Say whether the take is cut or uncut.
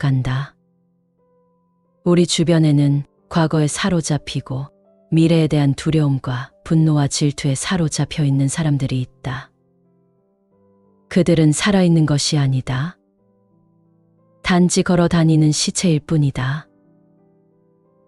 uncut